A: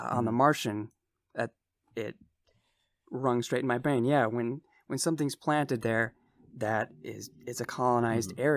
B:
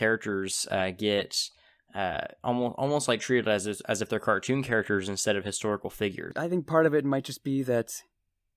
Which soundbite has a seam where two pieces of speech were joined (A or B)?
B